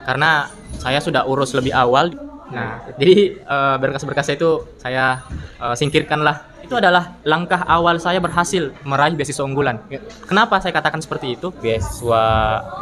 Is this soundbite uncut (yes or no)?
no